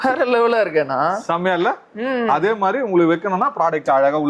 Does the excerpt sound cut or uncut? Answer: uncut